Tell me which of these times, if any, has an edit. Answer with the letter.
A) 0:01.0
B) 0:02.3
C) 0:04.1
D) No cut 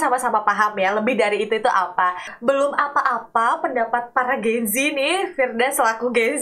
B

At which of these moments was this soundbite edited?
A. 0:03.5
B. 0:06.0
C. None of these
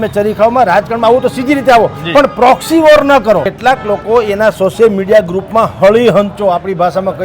A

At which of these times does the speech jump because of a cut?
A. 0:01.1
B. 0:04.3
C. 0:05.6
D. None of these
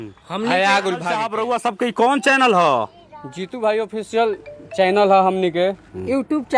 A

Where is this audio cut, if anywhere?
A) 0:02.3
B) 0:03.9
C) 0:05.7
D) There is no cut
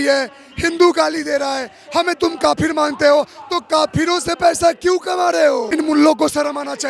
C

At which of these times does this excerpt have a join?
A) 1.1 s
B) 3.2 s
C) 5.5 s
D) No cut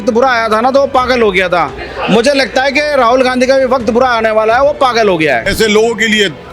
C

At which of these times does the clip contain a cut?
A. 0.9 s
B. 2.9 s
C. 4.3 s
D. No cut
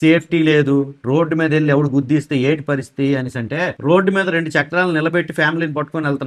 D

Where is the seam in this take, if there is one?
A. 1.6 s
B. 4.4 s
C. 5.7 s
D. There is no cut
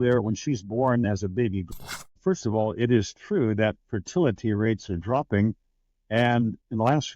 A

